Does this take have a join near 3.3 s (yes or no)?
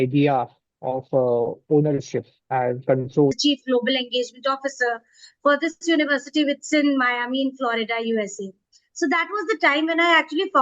yes